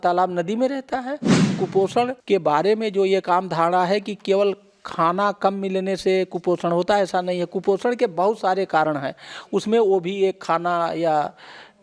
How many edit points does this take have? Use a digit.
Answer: 1